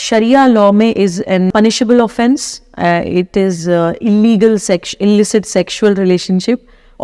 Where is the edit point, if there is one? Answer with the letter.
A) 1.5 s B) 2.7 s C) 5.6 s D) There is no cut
A